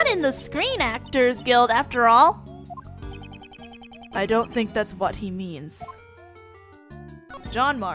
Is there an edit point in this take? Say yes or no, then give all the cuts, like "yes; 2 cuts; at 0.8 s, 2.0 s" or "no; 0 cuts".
yes; 1 cut; at 4.3 s